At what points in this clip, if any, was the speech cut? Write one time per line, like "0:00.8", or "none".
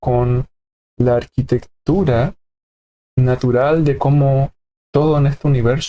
none